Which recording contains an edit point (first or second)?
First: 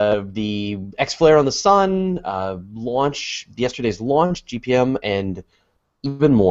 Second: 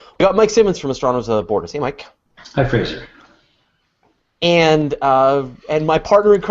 second